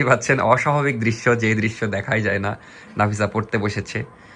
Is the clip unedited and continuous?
yes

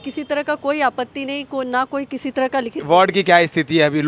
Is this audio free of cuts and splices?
no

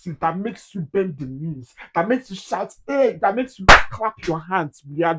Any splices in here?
no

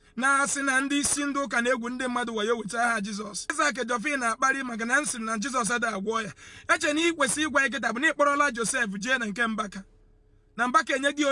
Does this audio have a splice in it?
yes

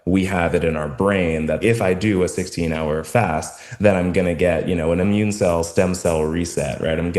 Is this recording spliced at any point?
yes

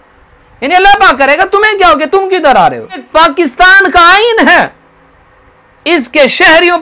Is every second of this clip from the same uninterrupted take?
no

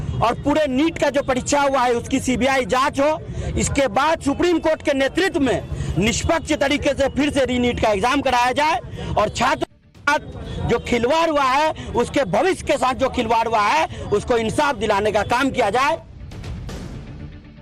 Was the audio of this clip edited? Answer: no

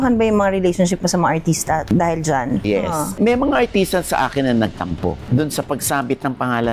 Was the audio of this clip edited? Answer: yes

